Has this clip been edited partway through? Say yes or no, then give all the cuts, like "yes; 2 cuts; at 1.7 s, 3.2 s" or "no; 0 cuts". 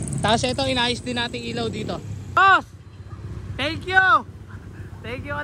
yes; 1 cut; at 2.3 s